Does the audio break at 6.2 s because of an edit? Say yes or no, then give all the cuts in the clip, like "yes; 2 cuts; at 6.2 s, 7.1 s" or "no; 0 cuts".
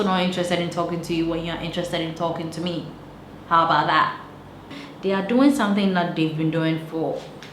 no; 1 cut; at 4.8 s